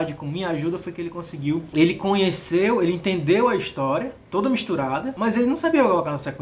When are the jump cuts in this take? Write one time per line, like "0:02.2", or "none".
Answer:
0:01.7
0:05.1